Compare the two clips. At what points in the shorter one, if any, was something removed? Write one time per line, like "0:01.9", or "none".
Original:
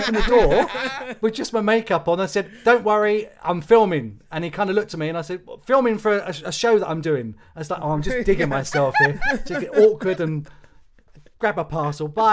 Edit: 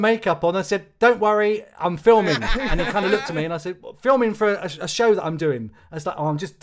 none

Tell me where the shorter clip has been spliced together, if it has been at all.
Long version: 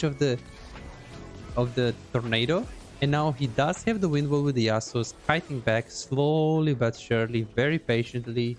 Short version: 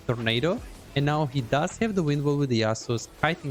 none

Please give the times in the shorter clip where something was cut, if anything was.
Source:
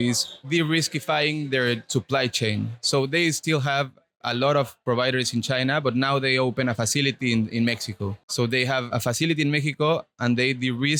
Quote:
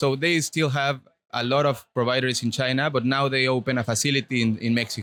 none

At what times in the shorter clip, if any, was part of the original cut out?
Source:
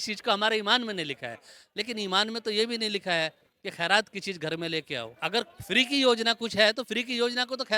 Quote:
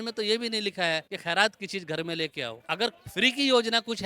0:01.1

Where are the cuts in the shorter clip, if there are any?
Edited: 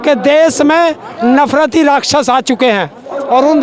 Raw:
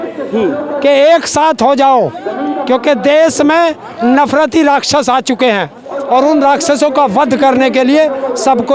none

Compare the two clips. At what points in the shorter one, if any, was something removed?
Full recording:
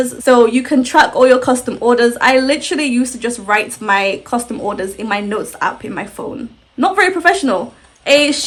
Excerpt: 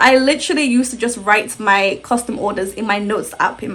none

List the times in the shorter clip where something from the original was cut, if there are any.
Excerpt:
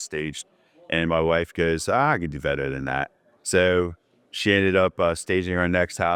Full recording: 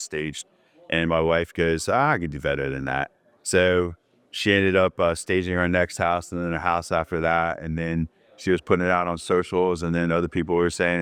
none

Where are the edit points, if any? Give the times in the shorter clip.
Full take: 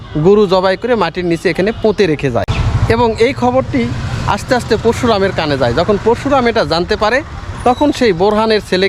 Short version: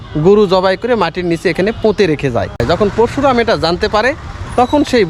0:02.6

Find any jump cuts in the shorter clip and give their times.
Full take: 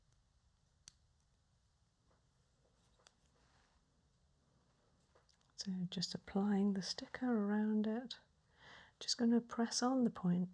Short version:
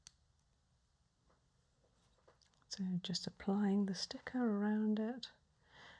0:02.2

